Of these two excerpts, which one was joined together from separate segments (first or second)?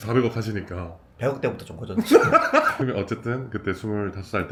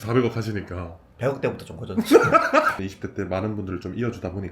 second